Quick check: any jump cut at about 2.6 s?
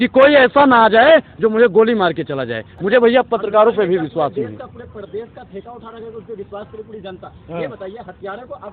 no; 0 cuts

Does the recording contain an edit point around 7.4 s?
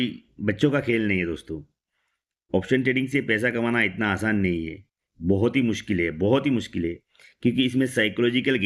no; 0 cuts

